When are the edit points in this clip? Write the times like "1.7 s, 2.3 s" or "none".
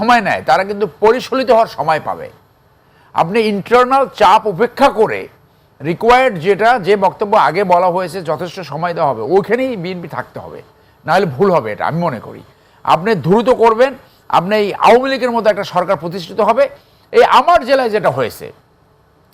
17.0 s